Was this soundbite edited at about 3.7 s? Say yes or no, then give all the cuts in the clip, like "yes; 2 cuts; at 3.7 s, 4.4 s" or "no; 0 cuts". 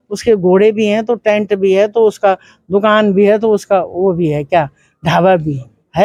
no; 0 cuts